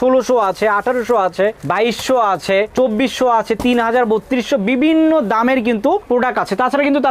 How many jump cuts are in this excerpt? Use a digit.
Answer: 0